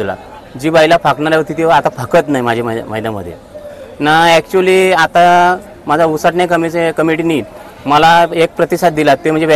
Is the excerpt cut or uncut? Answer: uncut